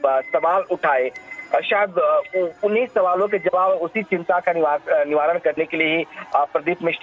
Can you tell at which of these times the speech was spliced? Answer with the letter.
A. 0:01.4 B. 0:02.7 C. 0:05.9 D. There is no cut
C